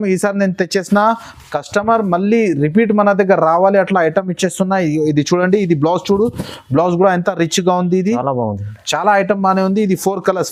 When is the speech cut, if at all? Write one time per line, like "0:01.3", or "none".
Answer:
none